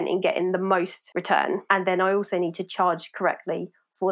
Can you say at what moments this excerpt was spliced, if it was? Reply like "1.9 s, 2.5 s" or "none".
1.1 s